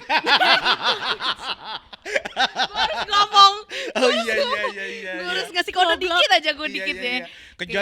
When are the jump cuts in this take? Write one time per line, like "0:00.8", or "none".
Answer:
none